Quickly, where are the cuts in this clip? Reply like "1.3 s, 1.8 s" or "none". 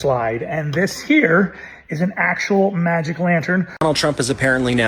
3.7 s